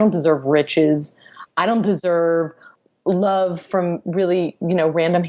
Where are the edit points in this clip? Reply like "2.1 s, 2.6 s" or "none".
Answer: 2.7 s